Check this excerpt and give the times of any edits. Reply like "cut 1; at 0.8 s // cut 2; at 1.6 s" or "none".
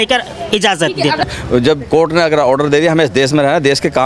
cut 1; at 1.2 s